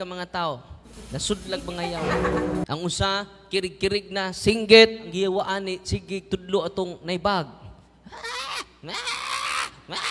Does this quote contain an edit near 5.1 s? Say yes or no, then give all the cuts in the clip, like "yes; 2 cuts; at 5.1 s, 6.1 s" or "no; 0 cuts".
yes; 1 cut; at 5.1 s